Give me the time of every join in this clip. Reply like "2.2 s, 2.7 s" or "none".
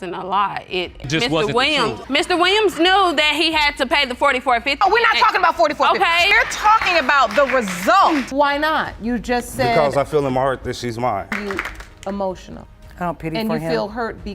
8.3 s